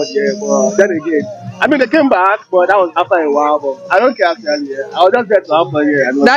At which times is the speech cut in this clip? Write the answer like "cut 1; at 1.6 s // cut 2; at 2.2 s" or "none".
none